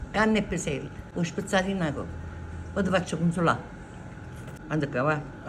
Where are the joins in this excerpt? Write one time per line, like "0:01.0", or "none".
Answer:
0:01.0